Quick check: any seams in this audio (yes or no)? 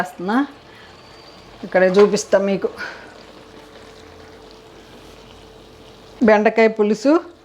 yes